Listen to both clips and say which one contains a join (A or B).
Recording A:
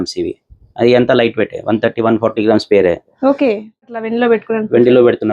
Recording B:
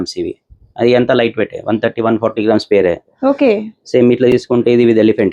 A